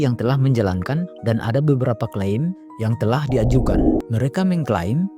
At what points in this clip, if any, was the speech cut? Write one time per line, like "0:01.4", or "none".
0:01.1
0:04.0